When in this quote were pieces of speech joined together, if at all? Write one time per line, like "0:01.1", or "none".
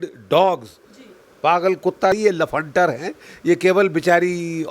0:02.1